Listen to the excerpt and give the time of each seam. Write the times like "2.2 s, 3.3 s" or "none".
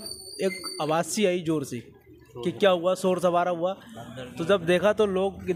none